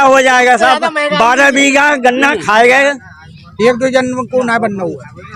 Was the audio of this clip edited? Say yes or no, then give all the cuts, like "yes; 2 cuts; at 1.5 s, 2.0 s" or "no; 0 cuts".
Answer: yes; 1 cut; at 3.1 s